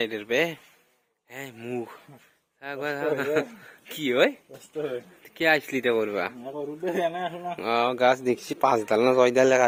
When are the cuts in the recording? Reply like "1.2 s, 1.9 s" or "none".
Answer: none